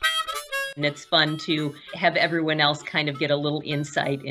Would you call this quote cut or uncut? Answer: cut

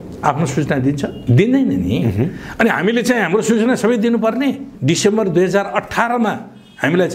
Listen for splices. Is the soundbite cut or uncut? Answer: cut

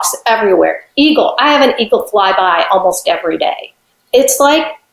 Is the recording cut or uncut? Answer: cut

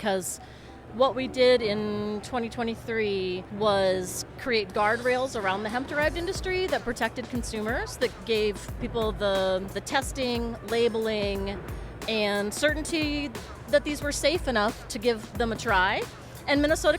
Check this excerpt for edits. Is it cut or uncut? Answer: cut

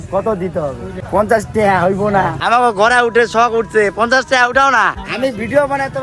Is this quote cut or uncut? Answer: cut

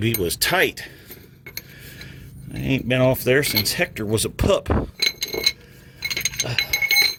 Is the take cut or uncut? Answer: uncut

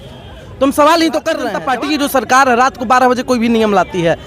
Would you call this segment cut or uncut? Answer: cut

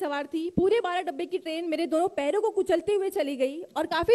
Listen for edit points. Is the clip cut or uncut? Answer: uncut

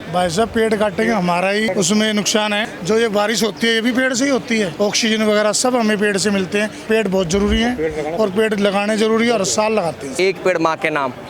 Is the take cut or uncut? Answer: cut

